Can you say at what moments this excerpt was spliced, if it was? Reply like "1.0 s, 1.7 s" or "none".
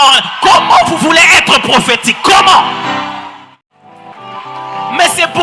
3.2 s